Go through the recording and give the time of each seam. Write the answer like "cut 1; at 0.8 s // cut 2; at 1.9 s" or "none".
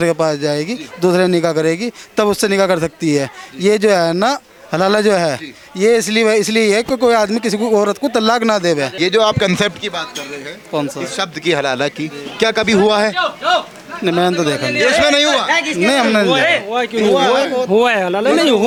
none